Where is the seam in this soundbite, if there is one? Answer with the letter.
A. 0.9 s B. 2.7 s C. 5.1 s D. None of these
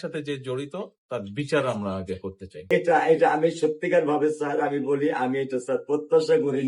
B